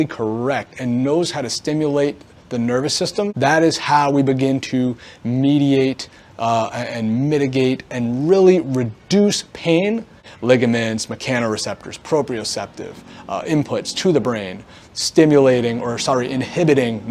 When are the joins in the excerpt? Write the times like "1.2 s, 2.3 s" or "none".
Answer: 3.3 s, 10.2 s

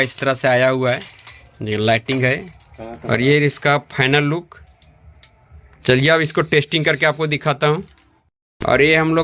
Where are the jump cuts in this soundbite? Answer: none

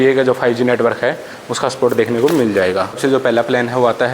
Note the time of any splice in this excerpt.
3.0 s

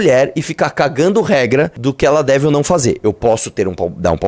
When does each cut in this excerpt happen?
1.8 s

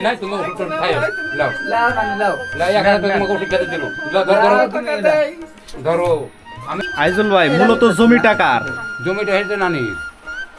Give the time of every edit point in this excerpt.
6.8 s

